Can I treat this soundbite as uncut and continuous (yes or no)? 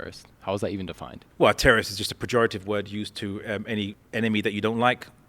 no